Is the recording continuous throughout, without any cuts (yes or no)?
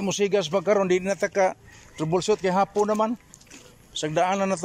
yes